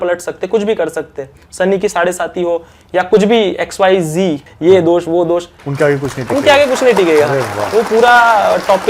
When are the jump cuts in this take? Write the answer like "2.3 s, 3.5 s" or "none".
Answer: 4.5 s, 5.6 s